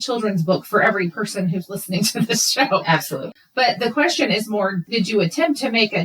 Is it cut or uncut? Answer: cut